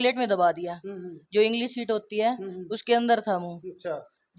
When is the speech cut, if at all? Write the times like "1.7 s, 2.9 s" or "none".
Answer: none